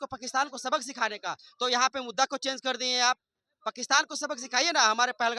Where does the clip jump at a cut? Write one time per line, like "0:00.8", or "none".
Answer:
none